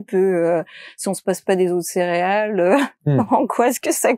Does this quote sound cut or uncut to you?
uncut